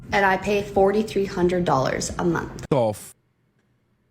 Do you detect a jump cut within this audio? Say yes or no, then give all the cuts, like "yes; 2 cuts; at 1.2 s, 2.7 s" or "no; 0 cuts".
yes; 1 cut; at 2.6 s